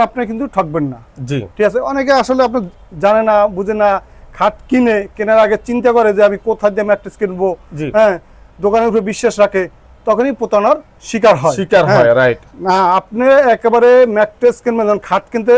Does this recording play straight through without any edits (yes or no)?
yes